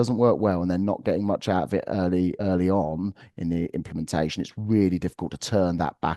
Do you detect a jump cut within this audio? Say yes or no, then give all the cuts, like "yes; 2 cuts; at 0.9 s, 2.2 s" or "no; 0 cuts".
yes; 1 cut; at 2.4 s